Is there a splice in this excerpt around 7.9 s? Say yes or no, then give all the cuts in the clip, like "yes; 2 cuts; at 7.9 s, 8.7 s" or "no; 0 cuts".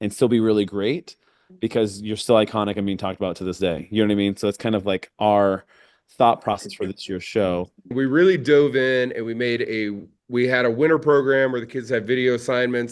yes; 1 cut; at 7.9 s